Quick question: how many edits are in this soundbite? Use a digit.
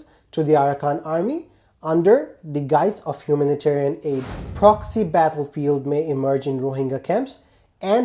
1